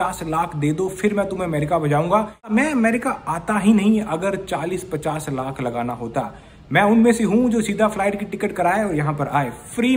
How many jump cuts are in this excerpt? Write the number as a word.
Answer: one